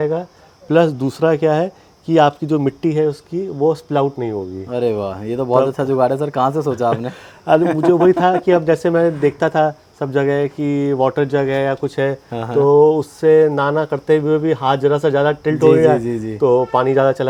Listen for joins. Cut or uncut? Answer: uncut